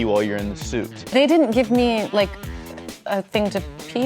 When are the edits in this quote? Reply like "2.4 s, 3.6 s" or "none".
1.0 s